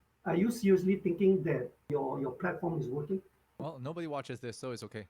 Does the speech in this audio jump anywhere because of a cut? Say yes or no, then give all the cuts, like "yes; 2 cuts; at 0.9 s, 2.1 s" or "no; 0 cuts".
yes; 2 cuts; at 1.9 s, 3.6 s